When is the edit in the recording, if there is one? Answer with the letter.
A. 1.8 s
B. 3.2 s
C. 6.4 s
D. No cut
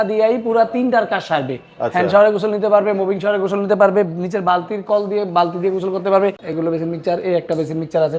C